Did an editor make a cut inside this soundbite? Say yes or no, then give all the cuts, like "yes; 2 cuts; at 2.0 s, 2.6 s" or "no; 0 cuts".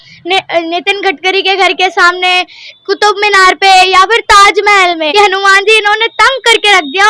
yes; 1 cut; at 5.1 s